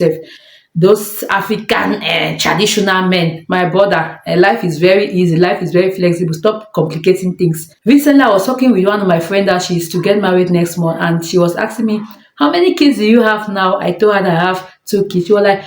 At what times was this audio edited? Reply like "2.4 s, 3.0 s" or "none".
7.7 s